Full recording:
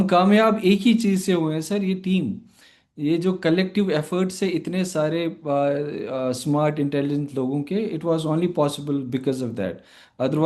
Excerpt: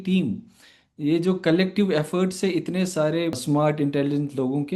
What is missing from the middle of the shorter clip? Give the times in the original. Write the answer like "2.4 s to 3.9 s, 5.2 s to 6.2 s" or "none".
5.4 s to 6.4 s